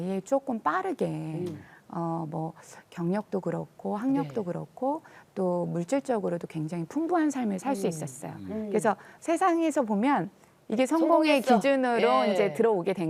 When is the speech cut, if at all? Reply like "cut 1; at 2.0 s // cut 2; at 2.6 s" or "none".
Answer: none